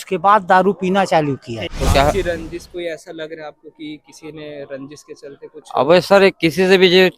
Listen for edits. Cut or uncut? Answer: cut